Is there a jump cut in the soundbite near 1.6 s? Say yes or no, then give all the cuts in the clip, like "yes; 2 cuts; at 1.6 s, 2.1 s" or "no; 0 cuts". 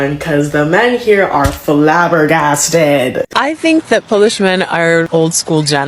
no; 1 cut; at 3.3 s